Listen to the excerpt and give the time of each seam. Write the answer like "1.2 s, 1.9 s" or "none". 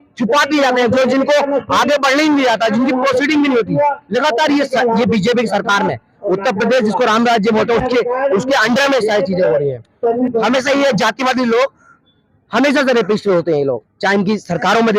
10.2 s